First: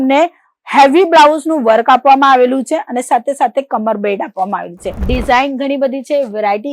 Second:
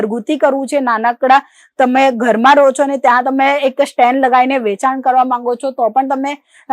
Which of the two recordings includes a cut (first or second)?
first